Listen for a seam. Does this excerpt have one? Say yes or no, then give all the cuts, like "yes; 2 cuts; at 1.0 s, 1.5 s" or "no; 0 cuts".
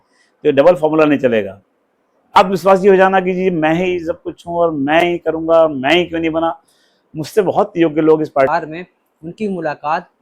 yes; 2 cuts; at 2.4 s, 8.5 s